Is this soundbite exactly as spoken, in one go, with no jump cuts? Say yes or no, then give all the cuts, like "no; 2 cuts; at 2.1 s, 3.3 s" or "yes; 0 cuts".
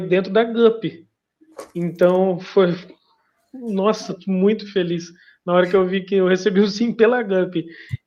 yes; 0 cuts